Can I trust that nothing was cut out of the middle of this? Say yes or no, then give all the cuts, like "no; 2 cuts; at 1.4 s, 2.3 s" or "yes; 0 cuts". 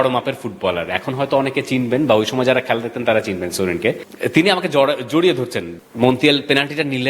no; 2 cuts; at 4.1 s, 5.7 s